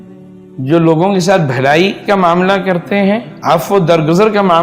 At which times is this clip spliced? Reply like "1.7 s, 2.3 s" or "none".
3.3 s